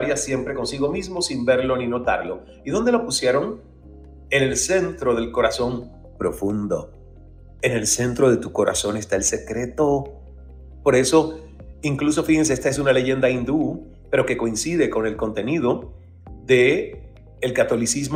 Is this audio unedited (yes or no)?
yes